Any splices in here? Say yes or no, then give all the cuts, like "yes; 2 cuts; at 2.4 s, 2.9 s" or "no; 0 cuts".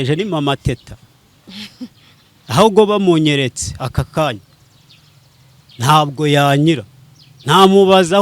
no; 0 cuts